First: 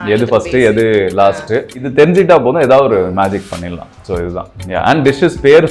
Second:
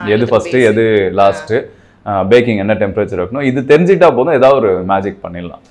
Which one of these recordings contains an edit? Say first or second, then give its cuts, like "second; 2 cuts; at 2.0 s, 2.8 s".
first; 1 cut; at 1.8 s